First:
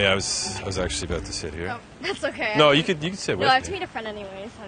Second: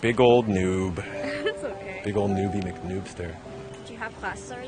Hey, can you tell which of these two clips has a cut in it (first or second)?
second